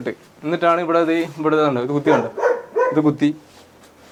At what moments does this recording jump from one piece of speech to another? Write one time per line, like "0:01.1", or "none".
none